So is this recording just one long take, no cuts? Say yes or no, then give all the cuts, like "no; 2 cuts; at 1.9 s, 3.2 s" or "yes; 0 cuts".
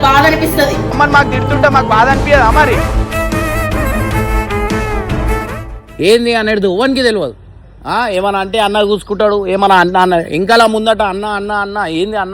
no; 1 cut; at 5.8 s